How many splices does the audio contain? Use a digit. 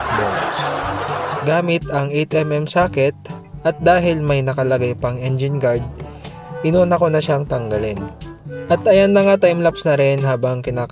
0